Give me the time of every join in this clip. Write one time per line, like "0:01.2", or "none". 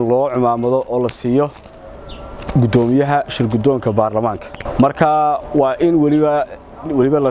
none